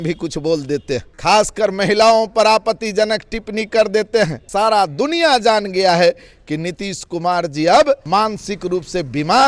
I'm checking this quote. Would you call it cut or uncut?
cut